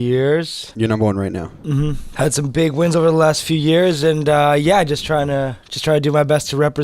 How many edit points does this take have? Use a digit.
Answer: 2